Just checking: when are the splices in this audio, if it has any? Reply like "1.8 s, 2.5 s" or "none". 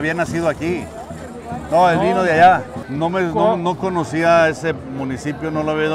2.8 s